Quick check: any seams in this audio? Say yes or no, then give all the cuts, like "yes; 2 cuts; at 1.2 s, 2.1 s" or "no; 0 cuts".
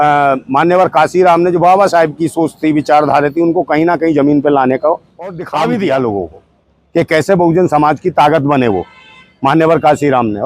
yes; 1 cut; at 5.4 s